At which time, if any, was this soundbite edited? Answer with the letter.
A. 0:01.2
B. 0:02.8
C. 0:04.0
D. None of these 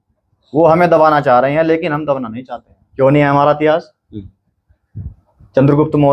B